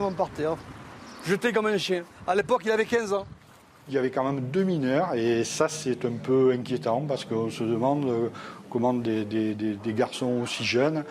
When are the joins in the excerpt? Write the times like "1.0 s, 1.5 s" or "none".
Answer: 3.9 s